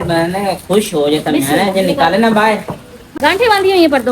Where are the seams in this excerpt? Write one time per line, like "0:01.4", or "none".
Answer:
0:03.2